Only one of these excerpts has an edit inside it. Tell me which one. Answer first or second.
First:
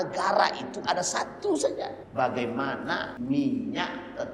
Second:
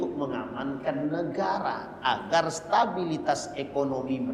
first